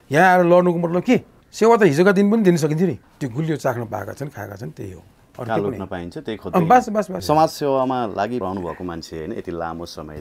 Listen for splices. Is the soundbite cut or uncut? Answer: cut